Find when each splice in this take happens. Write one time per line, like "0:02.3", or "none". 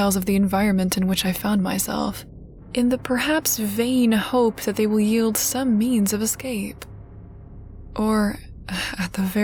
none